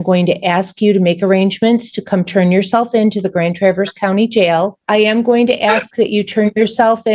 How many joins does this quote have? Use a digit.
1